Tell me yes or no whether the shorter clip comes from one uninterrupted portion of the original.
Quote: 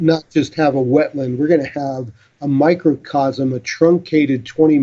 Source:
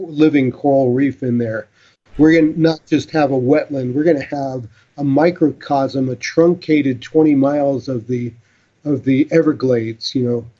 yes